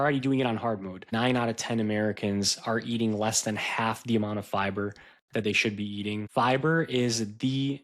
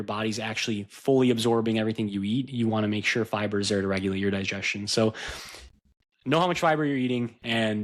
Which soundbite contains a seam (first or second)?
first